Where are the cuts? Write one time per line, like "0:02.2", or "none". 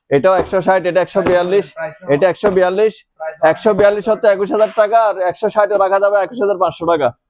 none

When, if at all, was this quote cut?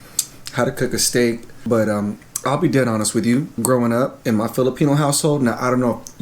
0:01.5
0:03.5
0:04.2

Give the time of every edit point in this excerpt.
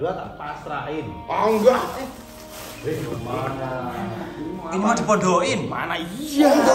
none

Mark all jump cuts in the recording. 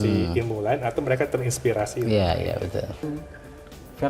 0:03.1

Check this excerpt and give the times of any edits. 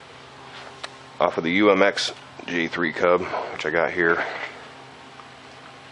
0:03.4

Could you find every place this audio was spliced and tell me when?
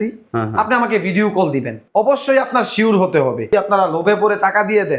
0:01.8
0:03.5

